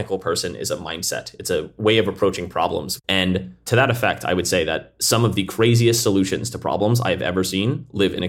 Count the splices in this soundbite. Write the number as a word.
zero